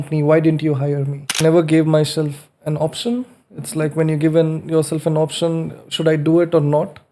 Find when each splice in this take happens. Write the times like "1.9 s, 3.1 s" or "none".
1.4 s